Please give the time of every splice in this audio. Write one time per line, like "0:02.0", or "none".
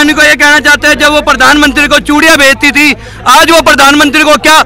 none

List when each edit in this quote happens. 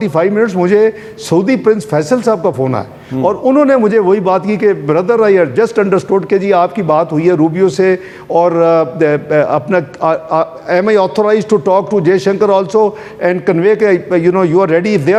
none

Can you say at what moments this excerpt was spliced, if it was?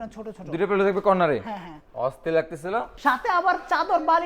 0:02.9

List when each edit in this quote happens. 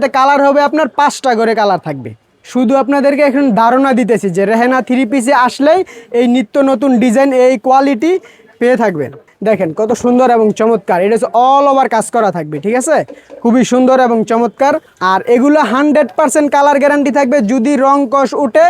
0:02.3
0:09.3
0:14.9

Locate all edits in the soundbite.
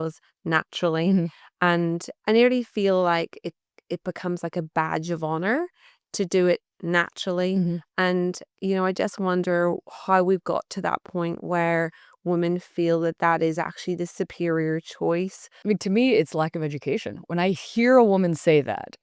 0:02.1
0:15.5

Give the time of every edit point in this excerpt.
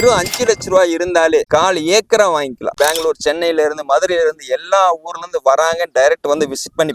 0:01.5
0:02.7

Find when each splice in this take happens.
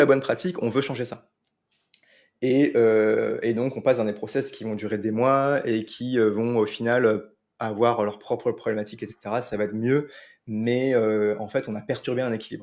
none

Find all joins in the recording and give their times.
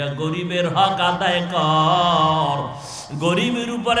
none

